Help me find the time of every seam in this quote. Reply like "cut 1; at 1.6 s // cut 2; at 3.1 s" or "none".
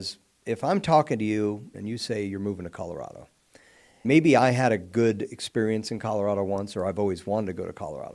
cut 1; at 1.7 s // cut 2; at 4.0 s